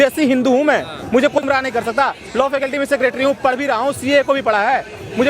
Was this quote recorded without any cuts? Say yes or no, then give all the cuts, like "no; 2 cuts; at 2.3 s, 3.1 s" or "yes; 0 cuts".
no; 1 cut; at 1.4 s